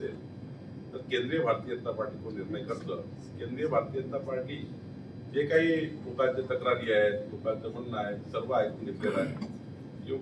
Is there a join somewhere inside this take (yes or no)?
no